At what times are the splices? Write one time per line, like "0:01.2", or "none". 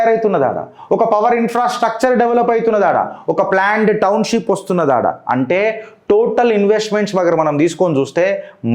none